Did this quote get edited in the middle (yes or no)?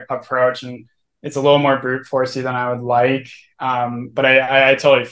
no